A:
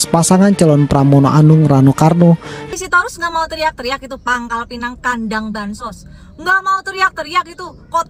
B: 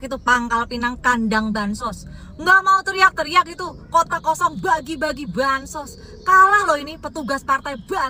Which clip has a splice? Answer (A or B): A